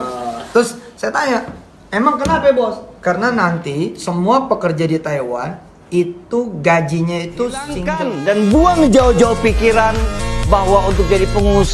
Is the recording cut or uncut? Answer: cut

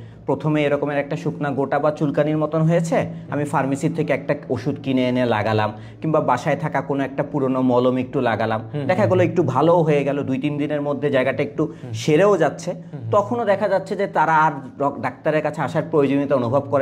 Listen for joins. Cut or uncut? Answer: uncut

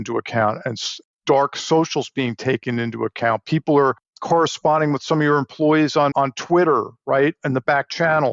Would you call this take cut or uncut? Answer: cut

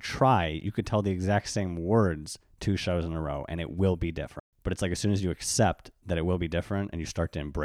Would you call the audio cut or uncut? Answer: cut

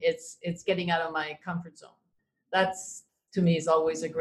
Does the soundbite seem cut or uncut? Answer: cut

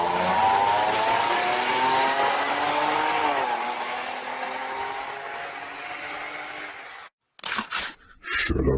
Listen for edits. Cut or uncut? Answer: uncut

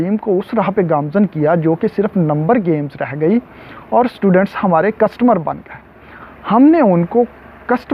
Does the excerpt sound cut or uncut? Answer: uncut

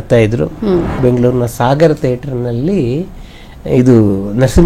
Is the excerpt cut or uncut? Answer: cut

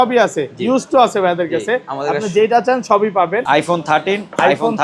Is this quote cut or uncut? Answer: cut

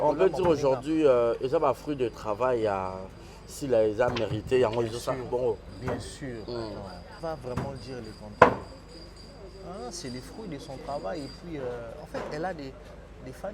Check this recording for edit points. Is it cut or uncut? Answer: cut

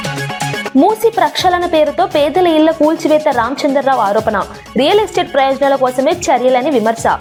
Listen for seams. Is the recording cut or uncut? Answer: uncut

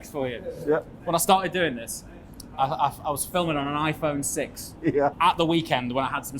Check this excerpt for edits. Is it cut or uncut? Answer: cut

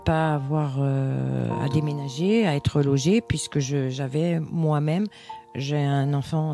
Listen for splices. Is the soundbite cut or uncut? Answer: uncut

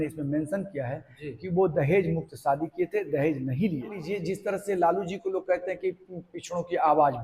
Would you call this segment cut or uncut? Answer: cut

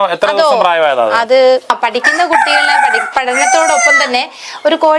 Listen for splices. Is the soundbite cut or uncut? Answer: cut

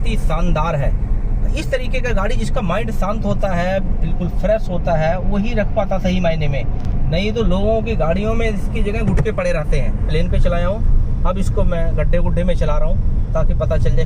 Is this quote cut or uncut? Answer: cut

